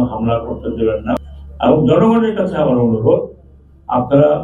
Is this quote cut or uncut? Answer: cut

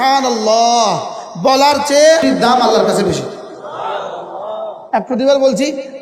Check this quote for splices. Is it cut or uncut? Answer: cut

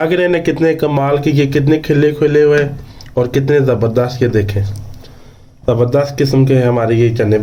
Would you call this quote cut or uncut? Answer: uncut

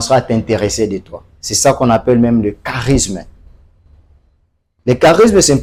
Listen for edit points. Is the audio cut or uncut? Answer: uncut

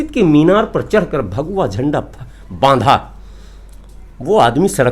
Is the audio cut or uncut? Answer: uncut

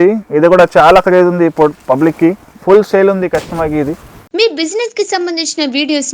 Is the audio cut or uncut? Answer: cut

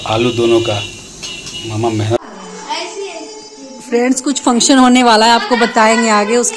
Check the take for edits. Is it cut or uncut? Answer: cut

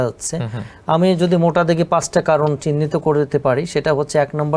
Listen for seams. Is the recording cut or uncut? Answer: uncut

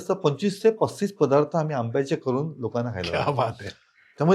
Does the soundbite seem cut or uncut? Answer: uncut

